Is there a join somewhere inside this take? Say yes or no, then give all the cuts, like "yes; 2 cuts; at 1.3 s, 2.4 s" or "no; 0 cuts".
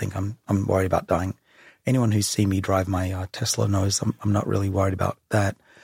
no; 0 cuts